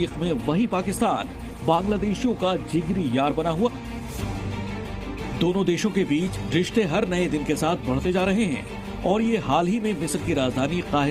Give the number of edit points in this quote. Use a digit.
0